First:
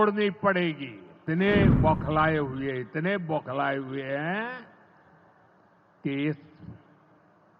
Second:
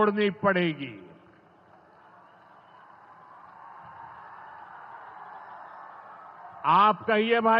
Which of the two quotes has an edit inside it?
first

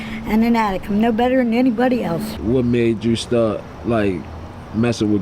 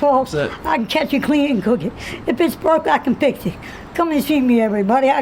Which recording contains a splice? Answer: first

